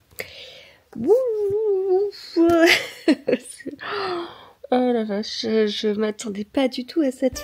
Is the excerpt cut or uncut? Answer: uncut